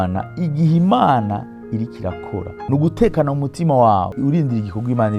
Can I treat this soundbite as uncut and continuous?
no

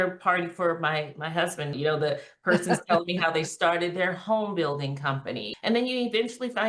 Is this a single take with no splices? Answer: no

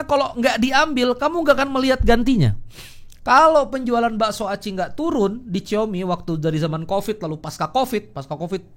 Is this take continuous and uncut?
yes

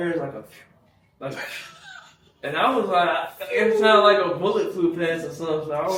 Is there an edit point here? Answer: no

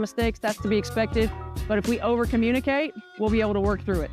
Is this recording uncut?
yes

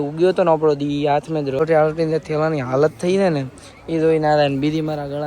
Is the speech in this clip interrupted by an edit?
yes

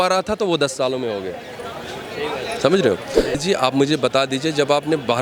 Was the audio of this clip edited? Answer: yes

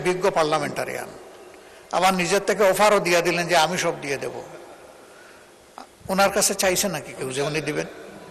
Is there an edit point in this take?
no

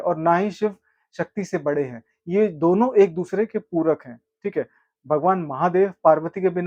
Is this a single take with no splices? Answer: yes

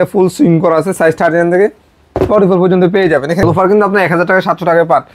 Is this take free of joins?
no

